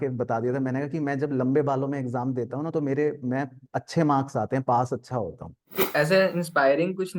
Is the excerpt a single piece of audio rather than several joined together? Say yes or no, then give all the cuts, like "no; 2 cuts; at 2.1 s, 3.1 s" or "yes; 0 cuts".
no; 1 cut; at 5.8 s